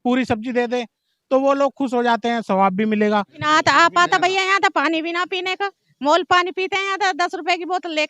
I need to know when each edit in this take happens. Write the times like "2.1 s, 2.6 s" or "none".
3.3 s